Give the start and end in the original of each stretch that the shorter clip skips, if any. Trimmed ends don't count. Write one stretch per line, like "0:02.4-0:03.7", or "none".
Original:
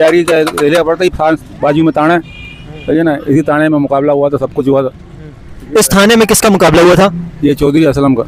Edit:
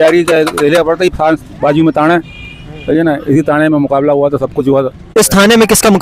0:05.0-0:05.6